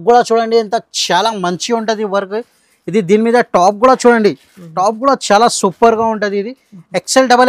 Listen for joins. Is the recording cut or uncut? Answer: uncut